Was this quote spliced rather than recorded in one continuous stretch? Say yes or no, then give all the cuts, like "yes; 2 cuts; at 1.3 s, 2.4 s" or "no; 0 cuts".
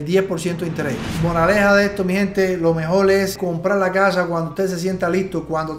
yes; 2 cuts; at 1.1 s, 3.4 s